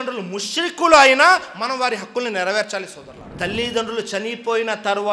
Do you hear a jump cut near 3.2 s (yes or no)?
yes